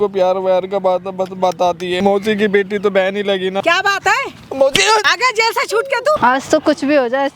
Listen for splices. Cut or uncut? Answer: cut